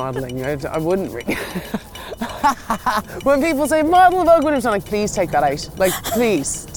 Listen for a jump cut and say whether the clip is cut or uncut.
cut